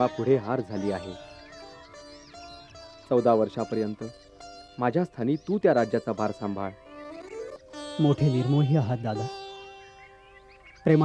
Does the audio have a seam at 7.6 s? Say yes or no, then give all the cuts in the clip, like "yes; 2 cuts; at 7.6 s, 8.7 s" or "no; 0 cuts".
yes; 2 cuts; at 1.4 s, 7.6 s